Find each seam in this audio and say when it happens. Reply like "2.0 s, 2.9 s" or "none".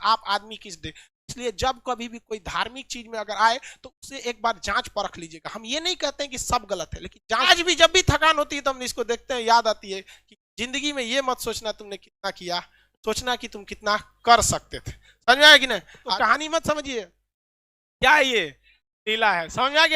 7.5 s, 16.0 s

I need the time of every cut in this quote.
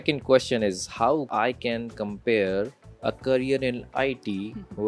1.3 s, 2.8 s

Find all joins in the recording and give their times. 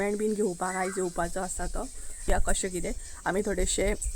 2.3 s

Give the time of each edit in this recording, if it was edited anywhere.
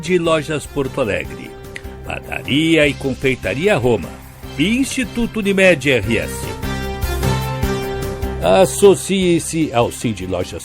6.5 s, 8.4 s

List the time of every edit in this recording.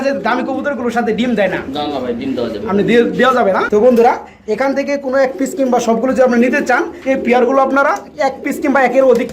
3.6 s, 6.9 s

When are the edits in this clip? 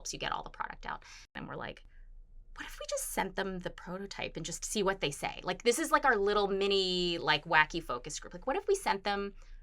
1.3 s

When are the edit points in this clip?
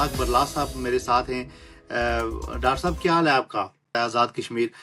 3.9 s

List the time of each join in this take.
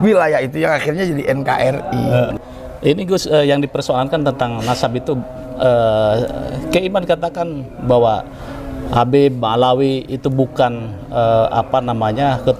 2.4 s

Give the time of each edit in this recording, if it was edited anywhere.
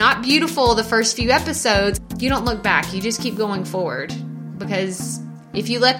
2.0 s

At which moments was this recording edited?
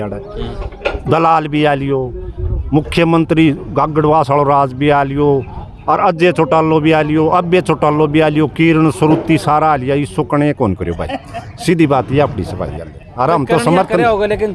none

